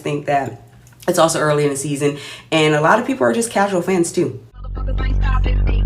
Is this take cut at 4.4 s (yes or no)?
yes